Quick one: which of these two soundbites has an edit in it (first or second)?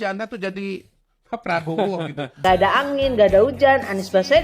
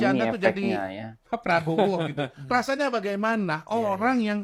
first